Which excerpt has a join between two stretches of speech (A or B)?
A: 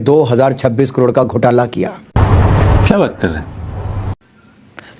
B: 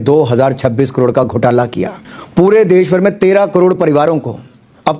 B